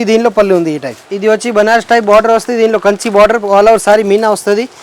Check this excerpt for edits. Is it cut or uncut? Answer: cut